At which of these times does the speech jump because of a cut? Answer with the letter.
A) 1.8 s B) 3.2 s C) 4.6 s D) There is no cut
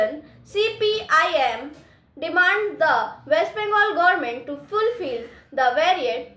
D